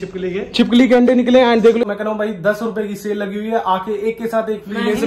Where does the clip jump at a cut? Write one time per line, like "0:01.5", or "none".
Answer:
0:01.8